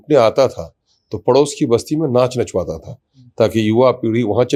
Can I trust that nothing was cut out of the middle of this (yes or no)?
yes